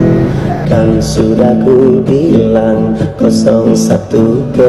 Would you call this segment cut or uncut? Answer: uncut